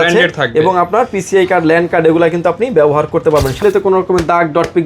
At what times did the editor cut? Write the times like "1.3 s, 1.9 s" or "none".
3.5 s